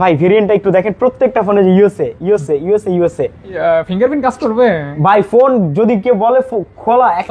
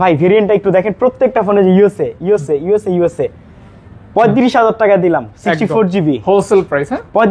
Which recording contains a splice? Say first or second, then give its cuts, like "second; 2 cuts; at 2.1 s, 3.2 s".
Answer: first; 1 cut; at 3.6 s